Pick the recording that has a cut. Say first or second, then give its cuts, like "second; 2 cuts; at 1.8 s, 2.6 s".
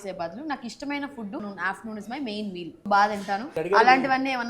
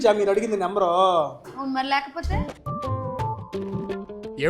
first; 3 cuts; at 1.5 s, 2.8 s, 3.6 s